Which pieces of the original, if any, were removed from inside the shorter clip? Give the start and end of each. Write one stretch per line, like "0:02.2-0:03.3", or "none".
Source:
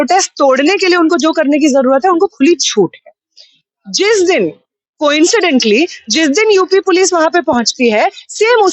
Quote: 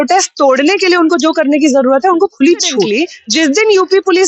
0:02.9-0:05.7